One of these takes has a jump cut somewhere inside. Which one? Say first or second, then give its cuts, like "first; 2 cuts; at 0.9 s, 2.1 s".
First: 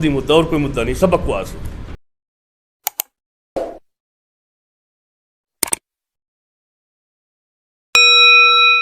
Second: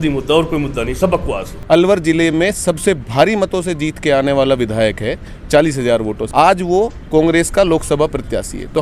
second; 2 cuts; at 1.5 s, 6.2 s